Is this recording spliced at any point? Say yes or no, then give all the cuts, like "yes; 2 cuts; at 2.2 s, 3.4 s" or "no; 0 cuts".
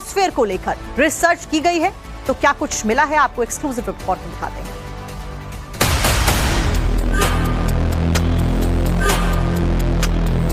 yes; 1 cut; at 1.3 s